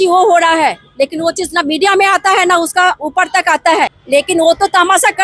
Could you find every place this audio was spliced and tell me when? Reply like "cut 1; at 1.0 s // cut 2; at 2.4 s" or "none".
cut 1; at 4.0 s